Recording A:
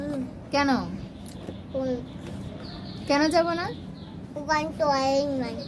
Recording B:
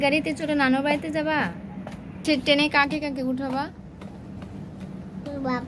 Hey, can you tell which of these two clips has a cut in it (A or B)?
B